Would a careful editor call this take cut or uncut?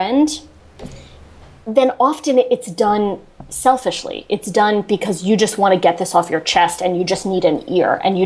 uncut